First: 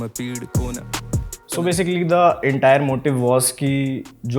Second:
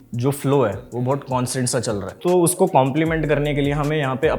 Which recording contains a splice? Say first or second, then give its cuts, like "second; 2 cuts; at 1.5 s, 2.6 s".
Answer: second; 1 cut; at 2.1 s